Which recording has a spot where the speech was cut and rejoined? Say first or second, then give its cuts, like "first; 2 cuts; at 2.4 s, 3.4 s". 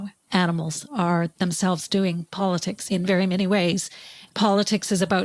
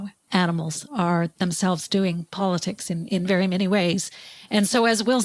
first; 2 cuts; at 2.8 s, 4.1 s